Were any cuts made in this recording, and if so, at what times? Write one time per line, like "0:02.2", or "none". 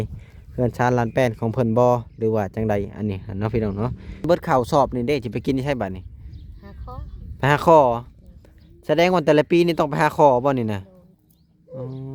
0:04.3